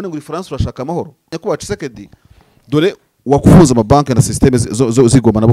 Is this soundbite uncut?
no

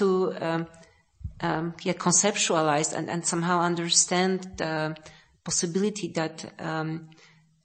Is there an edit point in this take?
no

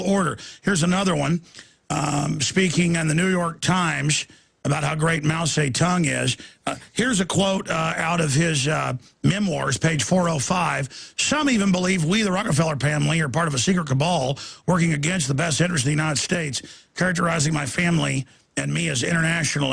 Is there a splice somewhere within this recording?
yes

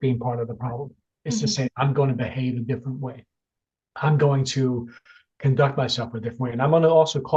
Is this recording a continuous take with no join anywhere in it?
yes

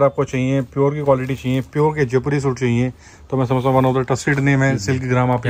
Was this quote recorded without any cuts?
yes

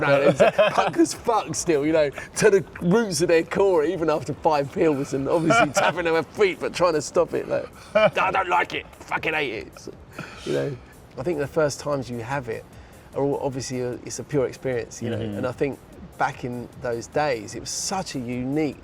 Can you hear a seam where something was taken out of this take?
yes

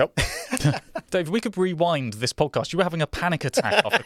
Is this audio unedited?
no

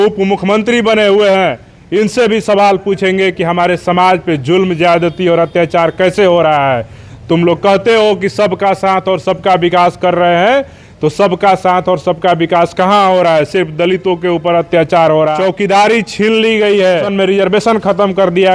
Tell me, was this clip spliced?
yes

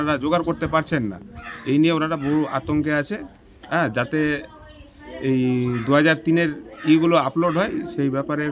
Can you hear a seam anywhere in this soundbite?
no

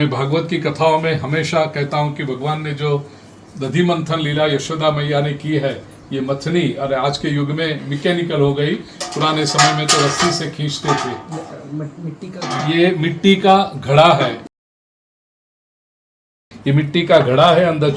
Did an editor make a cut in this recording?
no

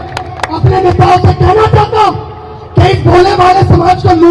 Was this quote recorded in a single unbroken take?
yes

